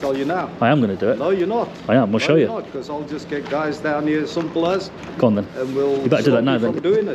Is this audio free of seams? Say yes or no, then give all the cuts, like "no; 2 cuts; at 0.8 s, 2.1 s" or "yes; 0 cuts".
yes; 0 cuts